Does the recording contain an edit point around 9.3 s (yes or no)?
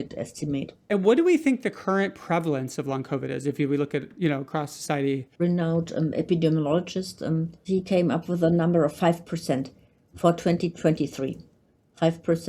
no